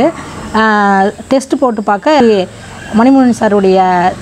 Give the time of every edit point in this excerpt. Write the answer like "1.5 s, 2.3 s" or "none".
2.2 s